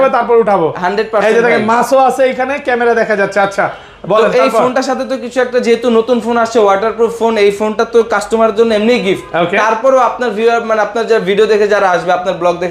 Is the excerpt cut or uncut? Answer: uncut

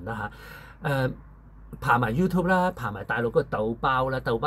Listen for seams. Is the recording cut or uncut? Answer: uncut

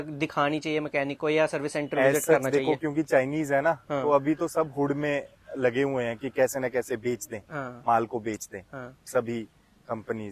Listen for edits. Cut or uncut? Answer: uncut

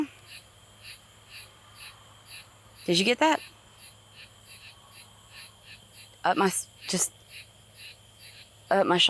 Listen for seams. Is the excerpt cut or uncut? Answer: uncut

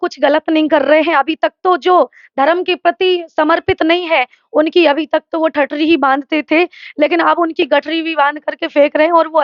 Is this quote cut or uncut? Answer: uncut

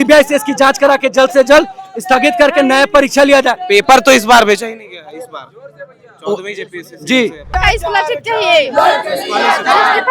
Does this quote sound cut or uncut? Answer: cut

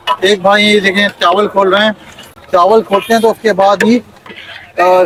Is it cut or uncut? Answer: uncut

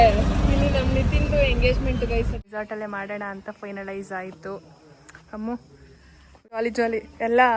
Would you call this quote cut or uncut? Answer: cut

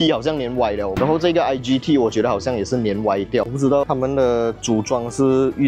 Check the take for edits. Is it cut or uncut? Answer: cut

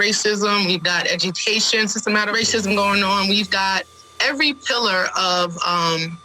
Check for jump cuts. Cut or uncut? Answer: cut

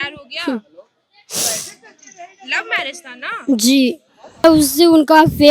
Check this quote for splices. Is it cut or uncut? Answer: cut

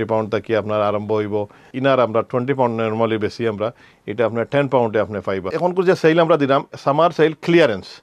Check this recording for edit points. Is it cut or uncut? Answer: cut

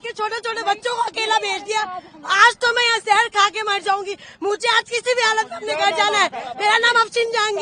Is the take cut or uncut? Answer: uncut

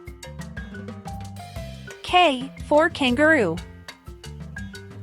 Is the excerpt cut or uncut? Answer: cut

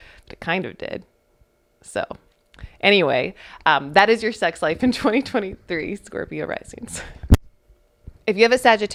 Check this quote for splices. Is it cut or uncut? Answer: uncut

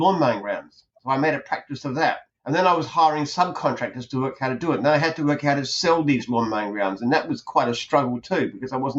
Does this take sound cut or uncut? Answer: cut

